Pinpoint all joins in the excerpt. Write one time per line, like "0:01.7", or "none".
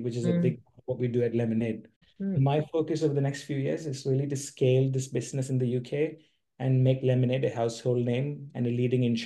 0:02.1